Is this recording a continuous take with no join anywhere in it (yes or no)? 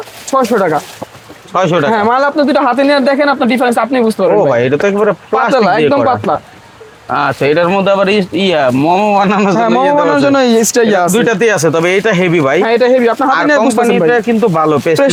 yes